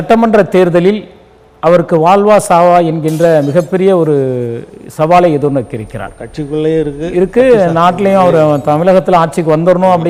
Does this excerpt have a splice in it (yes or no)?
no